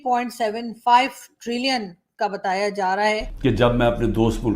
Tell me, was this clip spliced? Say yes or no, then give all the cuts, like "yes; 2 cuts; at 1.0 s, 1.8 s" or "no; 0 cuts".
yes; 1 cut; at 3.3 s